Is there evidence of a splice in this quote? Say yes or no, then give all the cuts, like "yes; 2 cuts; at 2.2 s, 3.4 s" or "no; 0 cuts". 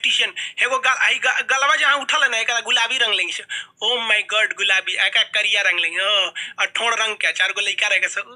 no; 0 cuts